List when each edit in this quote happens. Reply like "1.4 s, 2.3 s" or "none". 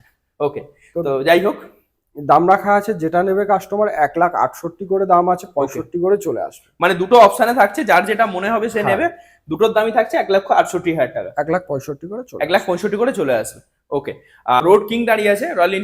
14.6 s